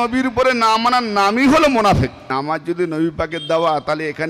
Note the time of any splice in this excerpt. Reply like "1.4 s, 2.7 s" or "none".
2.3 s

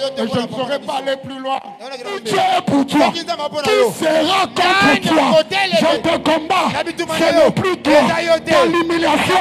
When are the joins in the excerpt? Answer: 2.2 s, 5.9 s

